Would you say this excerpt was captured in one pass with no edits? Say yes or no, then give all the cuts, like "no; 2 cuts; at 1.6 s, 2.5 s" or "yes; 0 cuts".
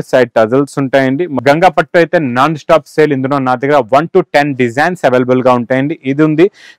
no; 1 cut; at 1.3 s